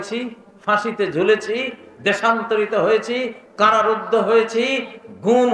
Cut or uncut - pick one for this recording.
uncut